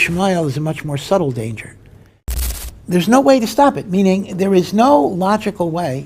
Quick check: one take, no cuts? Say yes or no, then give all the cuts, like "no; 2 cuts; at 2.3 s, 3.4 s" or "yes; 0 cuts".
no; 1 cut; at 2.4 s